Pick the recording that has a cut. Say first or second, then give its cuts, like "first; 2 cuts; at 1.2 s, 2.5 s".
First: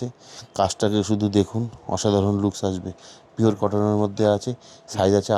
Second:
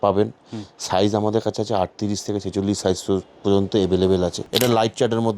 second; 1 cut; at 4.4 s